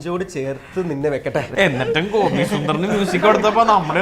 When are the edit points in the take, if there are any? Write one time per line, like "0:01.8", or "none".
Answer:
0:01.5